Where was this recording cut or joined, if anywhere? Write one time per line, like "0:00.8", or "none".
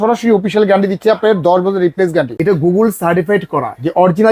0:02.4

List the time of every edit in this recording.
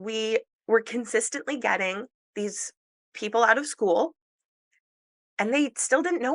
0:03.0

